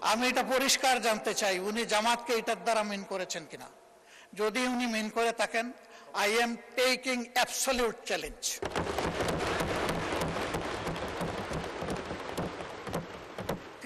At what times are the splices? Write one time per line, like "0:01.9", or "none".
none